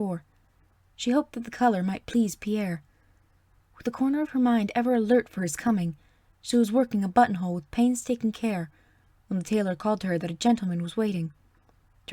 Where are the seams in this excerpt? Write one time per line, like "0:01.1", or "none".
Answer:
0:05.6